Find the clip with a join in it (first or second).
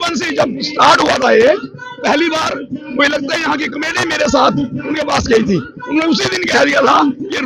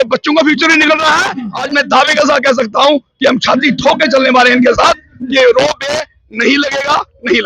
second